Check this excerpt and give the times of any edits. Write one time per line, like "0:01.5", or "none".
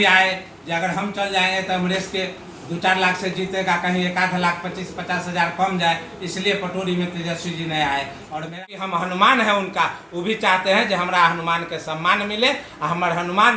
0:08.6